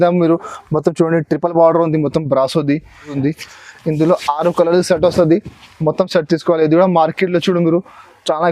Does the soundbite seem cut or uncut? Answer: cut